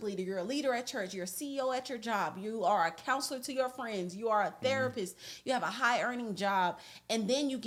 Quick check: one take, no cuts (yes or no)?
yes